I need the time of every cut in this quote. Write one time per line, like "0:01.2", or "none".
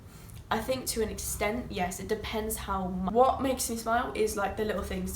0:03.1